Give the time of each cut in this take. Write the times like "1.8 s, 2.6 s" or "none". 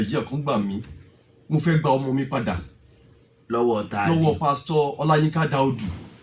none

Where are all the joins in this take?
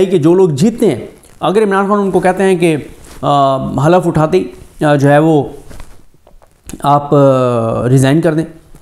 none

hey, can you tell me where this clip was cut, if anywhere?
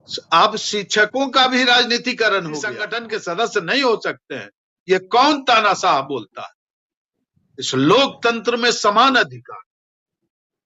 2.9 s

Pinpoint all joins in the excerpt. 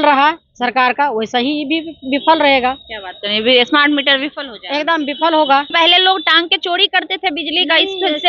5.7 s

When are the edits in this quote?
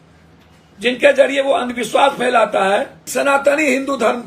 3.0 s

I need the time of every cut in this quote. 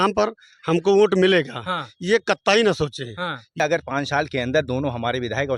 3.5 s

